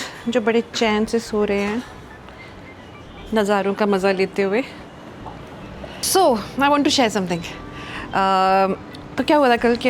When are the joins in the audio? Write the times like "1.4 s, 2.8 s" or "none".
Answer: none